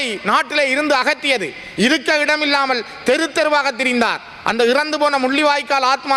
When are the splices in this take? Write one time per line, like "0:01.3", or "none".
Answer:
none